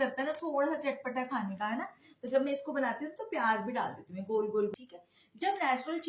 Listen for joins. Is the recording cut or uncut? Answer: cut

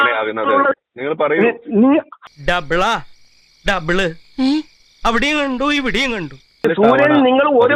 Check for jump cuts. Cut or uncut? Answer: cut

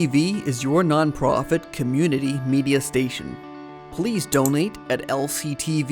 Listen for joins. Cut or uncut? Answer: uncut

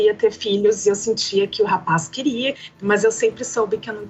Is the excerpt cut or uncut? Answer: cut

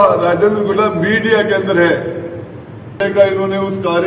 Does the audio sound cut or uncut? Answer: cut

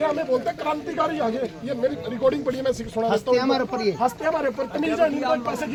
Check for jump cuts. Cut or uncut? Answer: uncut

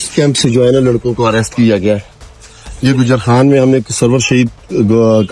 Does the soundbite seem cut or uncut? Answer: uncut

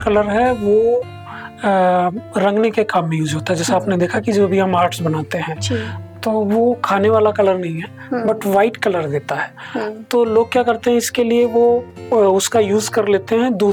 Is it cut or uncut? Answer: uncut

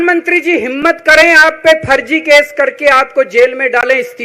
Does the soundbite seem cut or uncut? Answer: uncut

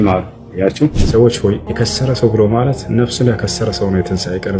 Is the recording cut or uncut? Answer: cut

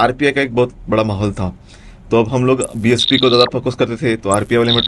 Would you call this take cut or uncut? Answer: uncut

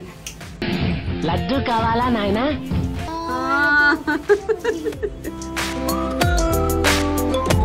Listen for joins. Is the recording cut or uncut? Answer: uncut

